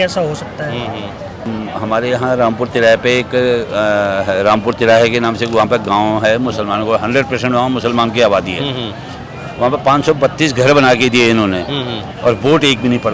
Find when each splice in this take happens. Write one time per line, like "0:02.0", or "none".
0:01.5

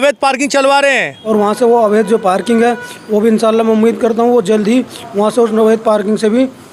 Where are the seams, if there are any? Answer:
0:01.1

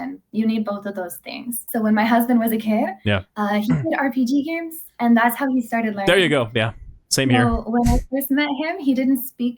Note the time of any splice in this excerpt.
0:01.7

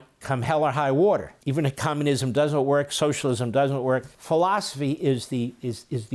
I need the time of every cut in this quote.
0:01.4
0:04.1

